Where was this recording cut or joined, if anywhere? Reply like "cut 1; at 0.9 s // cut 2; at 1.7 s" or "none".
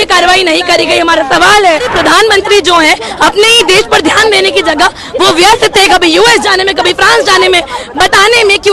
cut 1; at 1.9 s